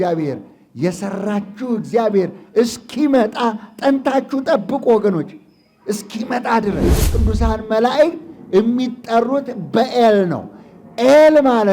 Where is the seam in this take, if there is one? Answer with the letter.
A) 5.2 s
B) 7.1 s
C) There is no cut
B